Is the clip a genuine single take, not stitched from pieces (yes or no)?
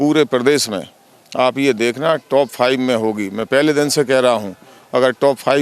yes